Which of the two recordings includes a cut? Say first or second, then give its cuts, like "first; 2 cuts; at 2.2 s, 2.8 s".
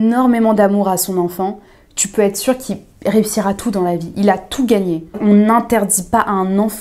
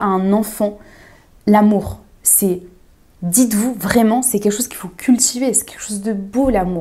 first; 1 cut; at 5.2 s